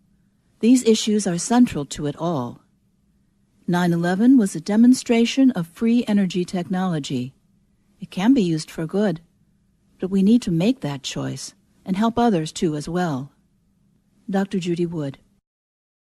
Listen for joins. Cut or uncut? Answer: cut